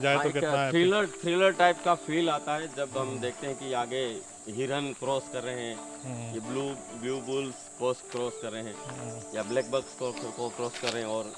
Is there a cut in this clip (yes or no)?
no